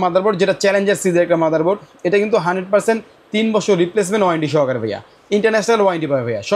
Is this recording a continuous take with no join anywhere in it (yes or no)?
yes